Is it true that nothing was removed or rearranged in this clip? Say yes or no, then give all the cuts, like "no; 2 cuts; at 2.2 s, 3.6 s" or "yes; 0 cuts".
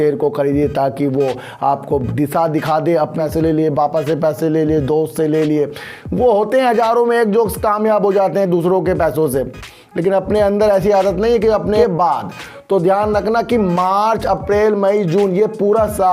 no; 2 cuts; at 3.2 s, 11.7 s